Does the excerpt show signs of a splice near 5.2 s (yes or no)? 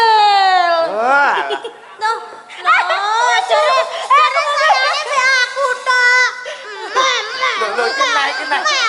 no